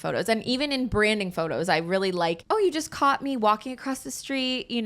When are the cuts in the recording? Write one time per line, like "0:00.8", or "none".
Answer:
0:02.4